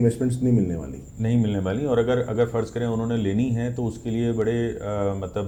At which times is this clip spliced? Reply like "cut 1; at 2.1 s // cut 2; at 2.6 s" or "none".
none